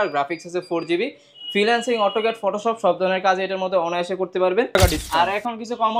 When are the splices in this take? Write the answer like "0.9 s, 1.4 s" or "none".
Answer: 4.8 s